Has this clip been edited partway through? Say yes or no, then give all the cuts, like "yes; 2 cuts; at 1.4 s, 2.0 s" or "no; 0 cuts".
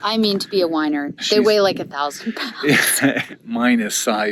yes; 2 cuts; at 1.2 s, 3.2 s